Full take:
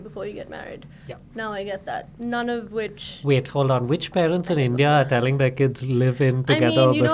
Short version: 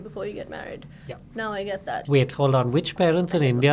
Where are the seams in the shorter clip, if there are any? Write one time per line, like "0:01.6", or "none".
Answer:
0:02.0